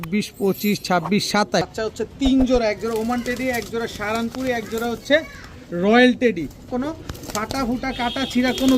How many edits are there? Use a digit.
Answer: 2